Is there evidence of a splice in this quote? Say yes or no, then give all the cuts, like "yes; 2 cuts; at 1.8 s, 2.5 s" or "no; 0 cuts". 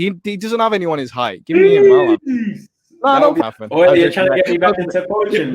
yes; 1 cut; at 3.4 s